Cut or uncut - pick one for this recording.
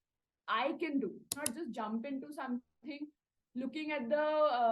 cut